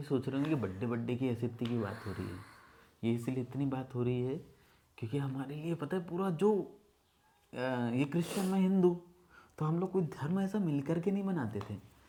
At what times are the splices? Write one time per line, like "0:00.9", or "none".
none